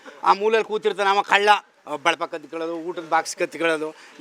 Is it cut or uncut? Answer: cut